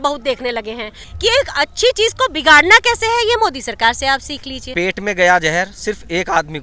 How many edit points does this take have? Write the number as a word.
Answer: two